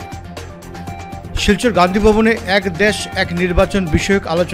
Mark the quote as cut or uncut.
cut